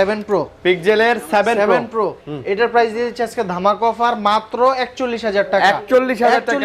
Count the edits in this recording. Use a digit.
0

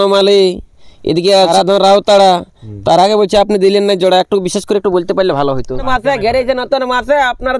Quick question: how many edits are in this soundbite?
2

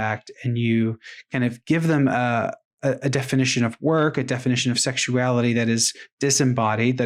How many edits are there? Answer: 0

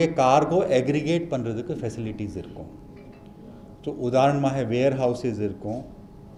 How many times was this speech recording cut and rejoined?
0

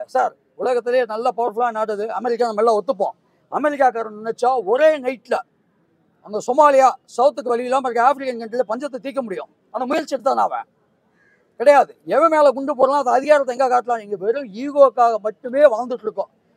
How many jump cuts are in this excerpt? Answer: 0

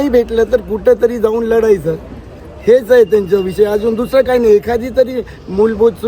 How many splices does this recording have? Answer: 0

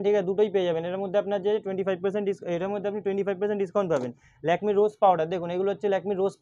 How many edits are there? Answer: 0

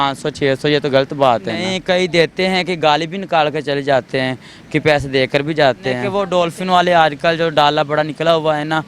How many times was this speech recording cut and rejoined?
2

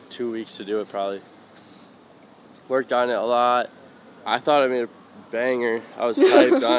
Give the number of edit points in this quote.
0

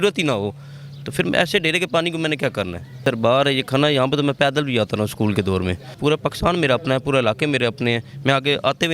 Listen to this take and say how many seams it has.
2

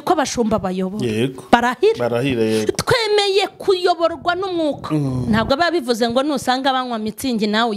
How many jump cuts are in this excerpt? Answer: 1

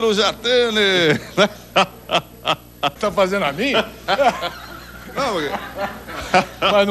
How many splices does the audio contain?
1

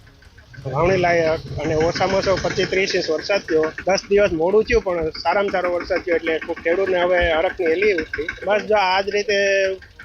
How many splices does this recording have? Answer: 2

